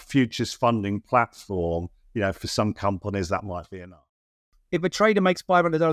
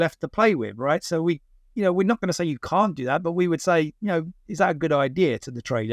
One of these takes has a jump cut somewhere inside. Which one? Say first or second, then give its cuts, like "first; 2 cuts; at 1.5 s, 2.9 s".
first; 1 cut; at 4.5 s